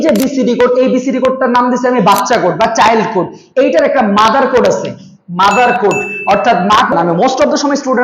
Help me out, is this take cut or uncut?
cut